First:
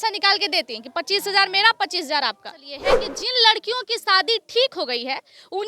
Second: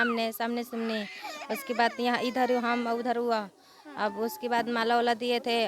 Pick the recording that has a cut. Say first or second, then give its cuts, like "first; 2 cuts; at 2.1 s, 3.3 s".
first; 1 cut; at 3.0 s